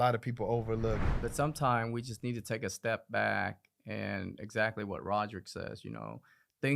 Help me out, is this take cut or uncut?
cut